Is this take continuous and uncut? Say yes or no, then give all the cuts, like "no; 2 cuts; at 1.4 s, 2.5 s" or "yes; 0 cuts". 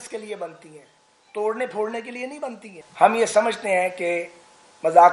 no; 1 cut; at 2.8 s